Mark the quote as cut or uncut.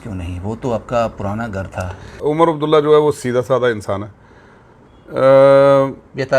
cut